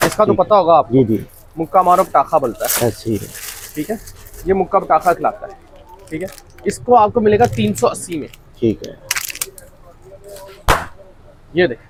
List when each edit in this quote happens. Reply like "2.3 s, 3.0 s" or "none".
none

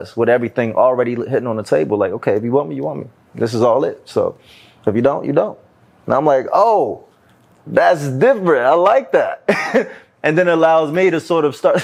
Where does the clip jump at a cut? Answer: none

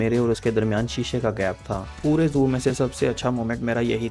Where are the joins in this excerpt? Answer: 1.9 s

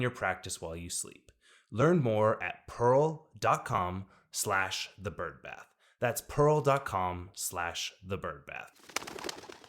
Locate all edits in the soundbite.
8.8 s

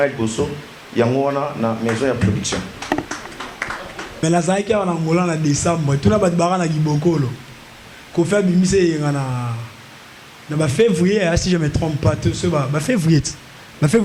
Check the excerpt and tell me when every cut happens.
4.0 s

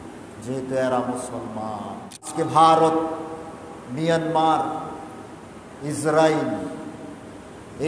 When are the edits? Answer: 2.3 s

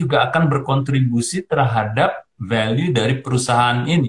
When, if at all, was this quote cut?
none

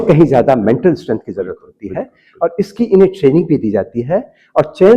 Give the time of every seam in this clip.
none

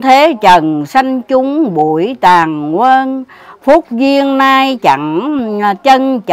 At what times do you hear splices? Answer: none

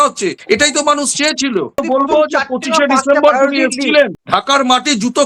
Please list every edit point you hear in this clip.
1.8 s

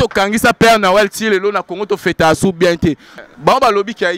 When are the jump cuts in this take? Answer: 3.1 s

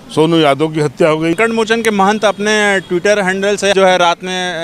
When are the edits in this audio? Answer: 1.4 s, 3.7 s

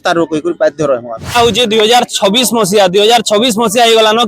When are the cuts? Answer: 1.4 s

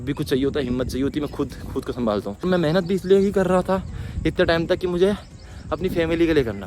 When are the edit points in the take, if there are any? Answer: 2.4 s

